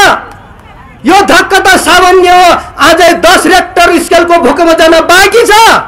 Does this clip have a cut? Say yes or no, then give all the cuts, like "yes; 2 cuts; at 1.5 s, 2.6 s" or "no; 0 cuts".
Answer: no; 0 cuts